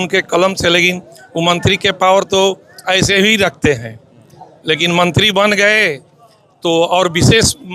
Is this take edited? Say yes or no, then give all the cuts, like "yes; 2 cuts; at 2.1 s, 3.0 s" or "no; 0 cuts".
no; 0 cuts